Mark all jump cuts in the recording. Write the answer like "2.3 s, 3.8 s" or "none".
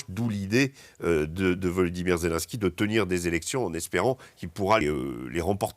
4.8 s